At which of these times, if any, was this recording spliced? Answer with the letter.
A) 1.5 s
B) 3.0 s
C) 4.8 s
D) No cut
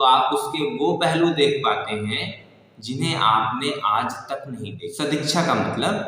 C